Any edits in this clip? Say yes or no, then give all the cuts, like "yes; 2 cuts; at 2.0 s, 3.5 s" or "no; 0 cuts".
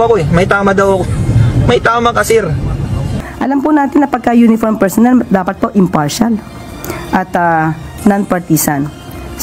yes; 1 cut; at 3.1 s